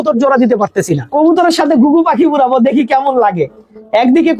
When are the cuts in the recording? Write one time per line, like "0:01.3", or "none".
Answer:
0:01.0